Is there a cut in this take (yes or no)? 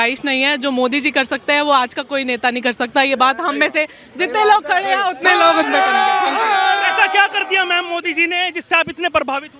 no